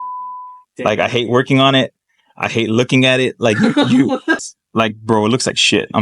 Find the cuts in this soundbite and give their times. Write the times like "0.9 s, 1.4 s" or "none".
4.3 s